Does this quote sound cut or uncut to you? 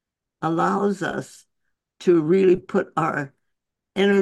uncut